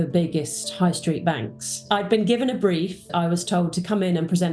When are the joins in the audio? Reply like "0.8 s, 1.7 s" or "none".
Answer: 1.8 s, 3.1 s